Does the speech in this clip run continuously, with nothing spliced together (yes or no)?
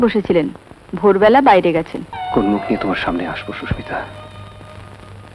no